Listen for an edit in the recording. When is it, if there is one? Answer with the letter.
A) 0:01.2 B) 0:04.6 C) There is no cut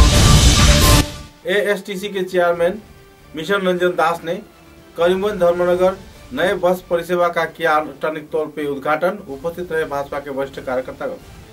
A